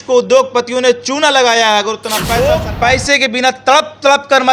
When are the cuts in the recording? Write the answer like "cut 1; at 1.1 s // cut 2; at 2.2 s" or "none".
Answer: cut 1; at 2.4 s